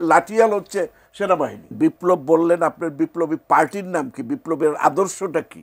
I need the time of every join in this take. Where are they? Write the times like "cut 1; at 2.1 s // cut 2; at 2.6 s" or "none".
cut 1; at 1.7 s